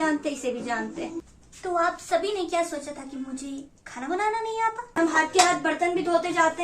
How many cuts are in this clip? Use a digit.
2